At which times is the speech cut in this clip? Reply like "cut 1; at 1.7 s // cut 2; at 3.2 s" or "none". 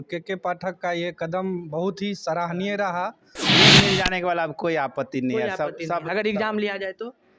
cut 1; at 3.5 s